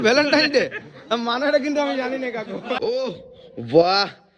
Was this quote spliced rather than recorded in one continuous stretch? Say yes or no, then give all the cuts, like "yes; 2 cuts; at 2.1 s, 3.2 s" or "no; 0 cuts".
yes; 1 cut; at 2.8 s